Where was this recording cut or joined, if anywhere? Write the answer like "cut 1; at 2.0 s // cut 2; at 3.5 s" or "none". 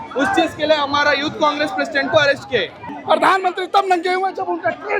cut 1; at 2.8 s